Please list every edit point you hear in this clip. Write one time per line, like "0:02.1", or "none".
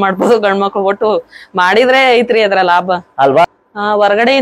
0:03.4